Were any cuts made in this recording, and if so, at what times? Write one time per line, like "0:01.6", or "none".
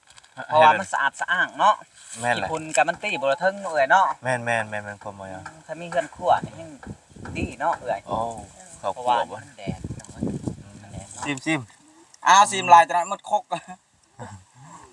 0:11.3